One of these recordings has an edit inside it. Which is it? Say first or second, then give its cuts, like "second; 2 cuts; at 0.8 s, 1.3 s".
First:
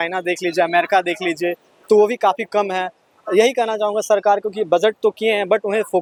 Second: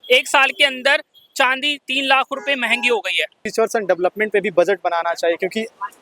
second; 1 cut; at 3.4 s